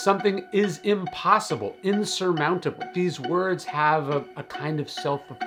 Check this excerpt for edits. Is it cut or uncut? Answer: uncut